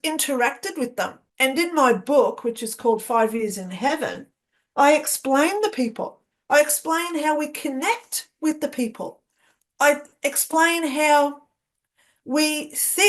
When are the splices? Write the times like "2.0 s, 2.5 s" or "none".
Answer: 1.2 s